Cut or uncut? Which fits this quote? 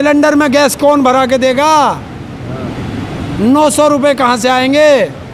uncut